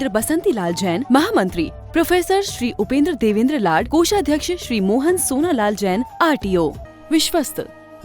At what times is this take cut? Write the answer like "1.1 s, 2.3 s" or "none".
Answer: 6.9 s